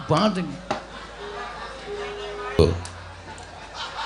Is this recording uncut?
no; 1 cut; at 2.6 s

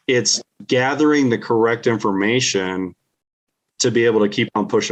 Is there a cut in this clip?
no; 0 cuts

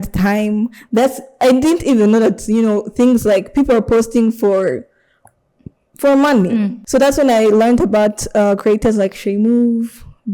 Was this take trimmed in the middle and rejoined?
yes; 1 cut; at 6.8 s

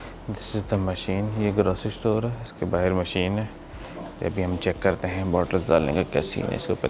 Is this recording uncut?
yes; 0 cuts

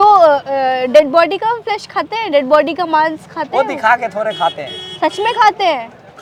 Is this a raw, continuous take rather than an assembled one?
yes; 0 cuts

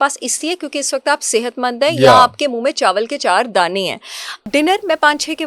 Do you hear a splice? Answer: yes; 1 cut; at 4.5 s

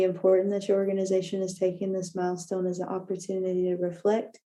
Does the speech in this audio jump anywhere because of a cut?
no; 0 cuts

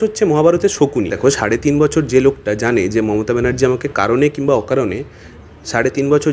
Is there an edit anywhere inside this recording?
yes; 1 cut; at 1.2 s

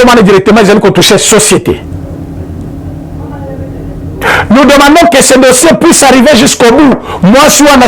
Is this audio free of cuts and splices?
yes; 0 cuts

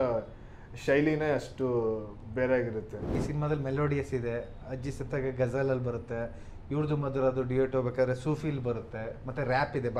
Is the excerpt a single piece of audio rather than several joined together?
no; 1 cut; at 3.2 s

